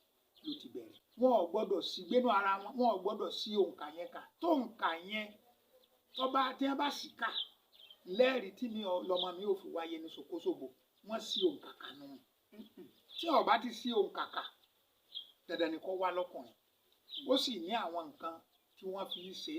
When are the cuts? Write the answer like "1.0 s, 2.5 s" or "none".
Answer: 1.0 s